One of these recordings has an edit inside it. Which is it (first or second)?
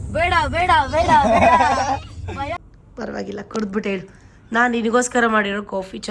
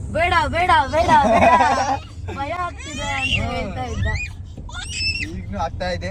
first